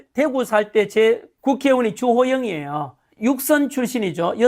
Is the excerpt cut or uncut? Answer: cut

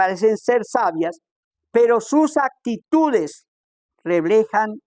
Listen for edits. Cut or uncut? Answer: uncut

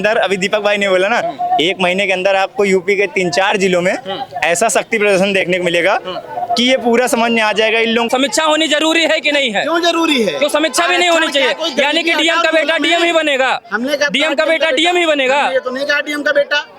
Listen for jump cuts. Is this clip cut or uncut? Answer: cut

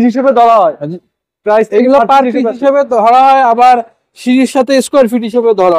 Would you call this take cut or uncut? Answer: uncut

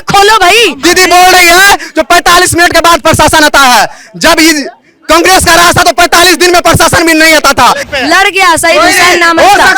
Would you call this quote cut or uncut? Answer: cut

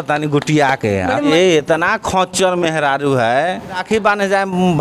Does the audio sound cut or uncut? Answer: cut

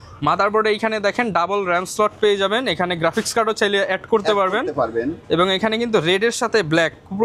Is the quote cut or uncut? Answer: uncut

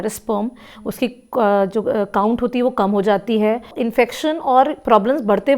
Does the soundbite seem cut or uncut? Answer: cut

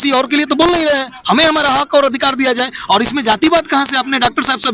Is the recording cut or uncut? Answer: uncut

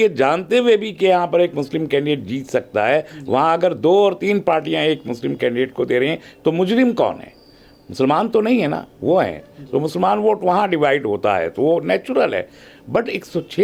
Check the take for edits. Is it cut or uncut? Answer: uncut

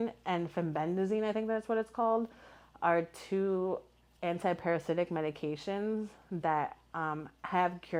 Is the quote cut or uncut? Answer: uncut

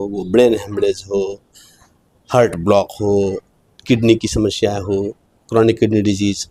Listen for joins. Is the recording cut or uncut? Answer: uncut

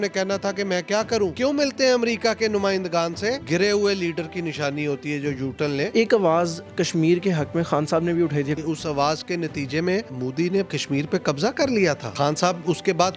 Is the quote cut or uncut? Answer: cut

